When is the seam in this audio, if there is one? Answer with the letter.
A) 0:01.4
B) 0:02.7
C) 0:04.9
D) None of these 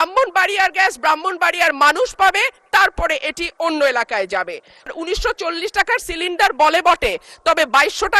C